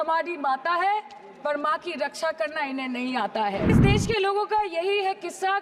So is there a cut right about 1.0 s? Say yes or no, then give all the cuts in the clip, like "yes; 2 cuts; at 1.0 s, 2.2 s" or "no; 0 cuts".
no; 1 cut; at 3.8 s